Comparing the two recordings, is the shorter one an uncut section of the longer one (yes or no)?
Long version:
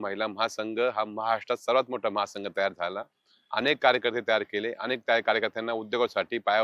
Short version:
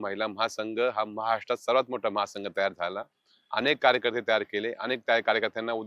yes